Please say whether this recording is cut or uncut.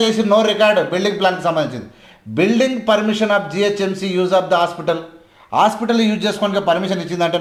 uncut